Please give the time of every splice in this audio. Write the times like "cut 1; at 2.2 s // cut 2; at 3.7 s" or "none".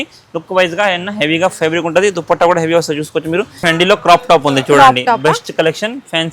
cut 1; at 3.6 s